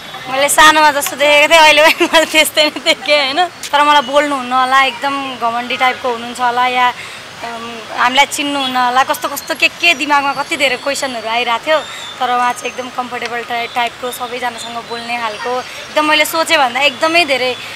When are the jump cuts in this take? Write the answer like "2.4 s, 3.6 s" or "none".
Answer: 3.6 s